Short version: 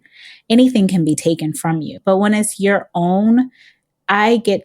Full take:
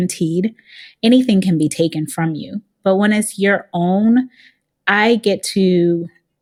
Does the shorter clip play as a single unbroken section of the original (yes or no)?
no